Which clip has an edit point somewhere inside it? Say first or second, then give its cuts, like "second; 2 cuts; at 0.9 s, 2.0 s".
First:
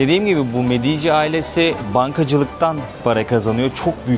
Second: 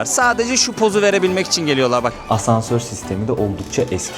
second; 1 cut; at 2.1 s